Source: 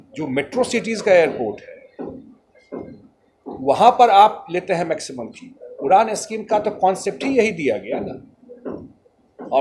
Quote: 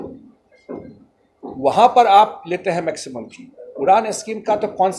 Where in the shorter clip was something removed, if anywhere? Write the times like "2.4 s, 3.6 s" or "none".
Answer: none